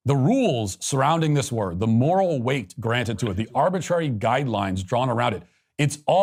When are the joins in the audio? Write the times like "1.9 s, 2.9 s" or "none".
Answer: none